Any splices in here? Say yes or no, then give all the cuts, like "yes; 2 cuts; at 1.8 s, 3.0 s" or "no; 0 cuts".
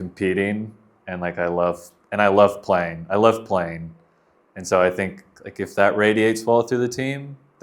no; 0 cuts